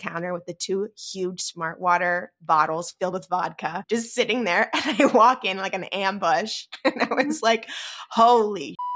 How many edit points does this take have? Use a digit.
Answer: 2